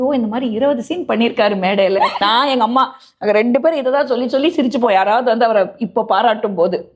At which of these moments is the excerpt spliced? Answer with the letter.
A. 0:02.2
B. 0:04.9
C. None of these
A